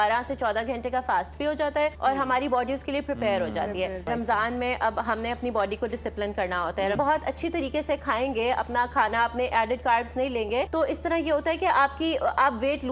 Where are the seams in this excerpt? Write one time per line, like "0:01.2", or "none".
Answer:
0:02.0
0:04.1
0:06.9
0:10.7